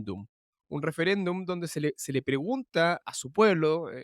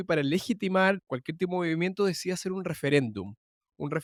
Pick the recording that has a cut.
first; 1 cut; at 3.0 s

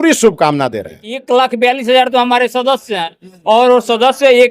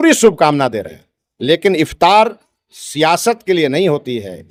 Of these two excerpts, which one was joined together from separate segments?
first; 1 cut; at 1.2 s

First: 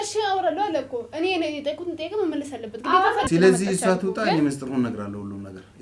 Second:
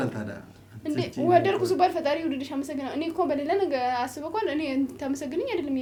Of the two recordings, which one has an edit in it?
first; 1 cut; at 3.2 s

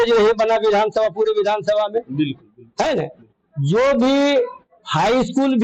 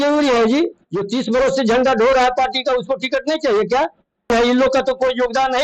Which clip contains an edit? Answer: second; 1 cut; at 4.3 s

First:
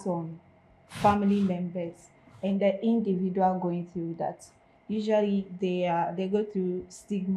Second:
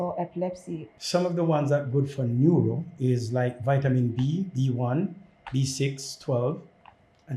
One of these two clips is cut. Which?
second; 1 cut; at 0.9 s

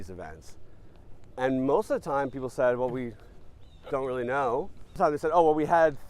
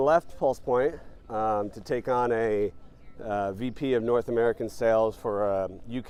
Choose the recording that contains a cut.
first; 1 cut; at 4.9 s

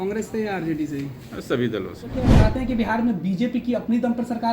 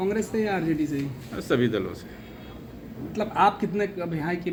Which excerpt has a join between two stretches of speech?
first; 1 cut; at 2.4 s

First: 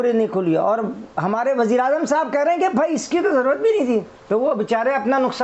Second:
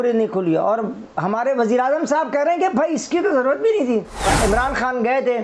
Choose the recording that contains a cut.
second; 1 cut; at 4.3 s

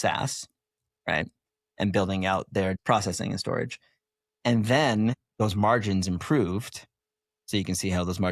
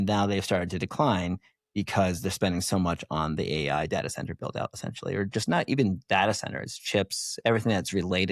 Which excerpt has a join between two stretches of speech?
first; 2 cuts; at 2.8 s, 5.2 s

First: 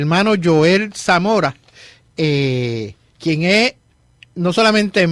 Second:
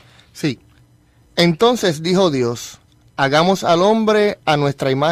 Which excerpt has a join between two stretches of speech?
second; 1 cut; at 3.1 s

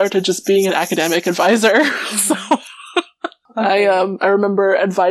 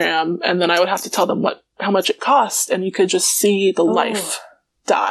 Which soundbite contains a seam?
first; 1 cut; at 3.4 s

